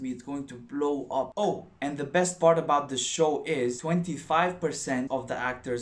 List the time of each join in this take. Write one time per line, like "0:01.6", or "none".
0:01.3
0:03.8
0:05.1